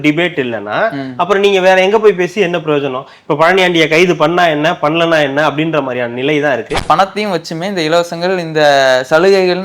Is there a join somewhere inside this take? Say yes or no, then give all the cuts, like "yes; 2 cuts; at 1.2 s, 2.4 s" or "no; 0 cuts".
yes; 1 cut; at 6.8 s